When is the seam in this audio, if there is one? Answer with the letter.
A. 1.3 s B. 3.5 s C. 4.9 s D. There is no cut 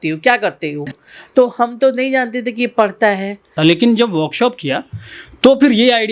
B